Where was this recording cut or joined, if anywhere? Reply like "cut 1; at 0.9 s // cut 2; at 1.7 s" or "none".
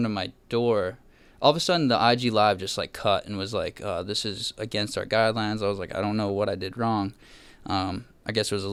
none